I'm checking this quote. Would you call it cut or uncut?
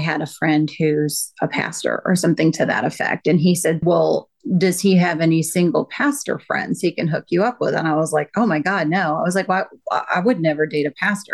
cut